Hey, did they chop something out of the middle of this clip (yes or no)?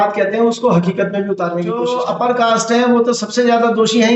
yes